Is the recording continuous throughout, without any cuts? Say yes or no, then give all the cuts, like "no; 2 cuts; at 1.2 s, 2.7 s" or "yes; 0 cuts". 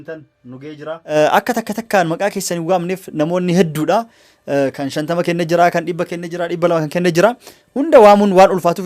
no; 1 cut; at 1.1 s